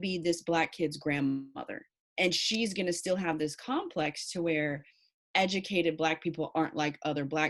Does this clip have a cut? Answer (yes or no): no